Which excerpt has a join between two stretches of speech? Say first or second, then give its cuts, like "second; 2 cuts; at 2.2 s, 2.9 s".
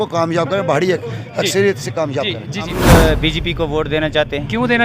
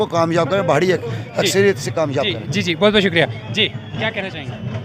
first; 1 cut; at 2.7 s